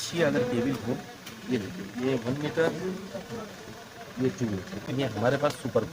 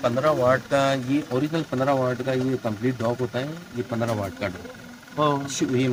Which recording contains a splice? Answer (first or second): first